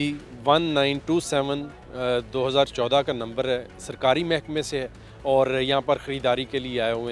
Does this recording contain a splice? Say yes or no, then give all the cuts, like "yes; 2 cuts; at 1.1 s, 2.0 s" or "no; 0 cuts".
no; 0 cuts